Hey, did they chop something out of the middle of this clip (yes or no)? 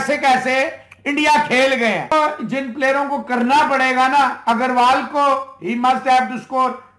yes